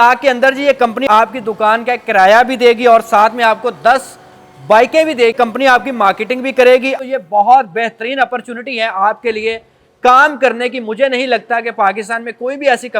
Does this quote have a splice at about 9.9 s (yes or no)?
no